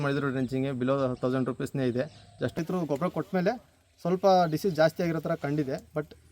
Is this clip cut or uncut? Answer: cut